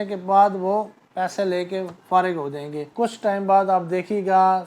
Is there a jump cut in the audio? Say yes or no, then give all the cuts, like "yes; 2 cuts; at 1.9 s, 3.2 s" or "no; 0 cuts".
yes; 1 cut; at 2.9 s